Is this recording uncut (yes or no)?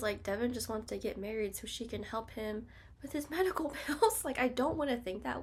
yes